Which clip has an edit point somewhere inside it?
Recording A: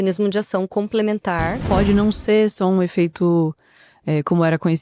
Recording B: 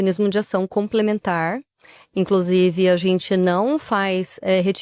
A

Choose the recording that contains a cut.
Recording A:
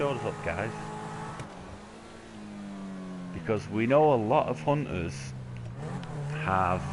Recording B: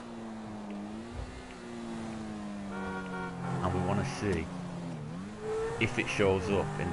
B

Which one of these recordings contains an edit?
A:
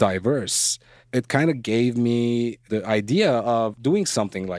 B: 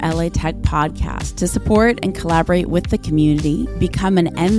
A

